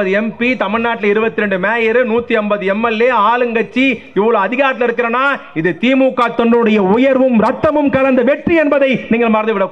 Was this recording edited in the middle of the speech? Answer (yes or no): no